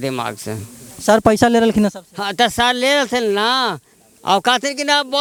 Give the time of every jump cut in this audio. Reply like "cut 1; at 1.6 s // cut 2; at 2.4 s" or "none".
none